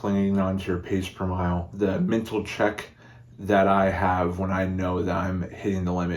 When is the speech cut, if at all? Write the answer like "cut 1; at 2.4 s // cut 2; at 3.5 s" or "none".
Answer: cut 1; at 1.7 s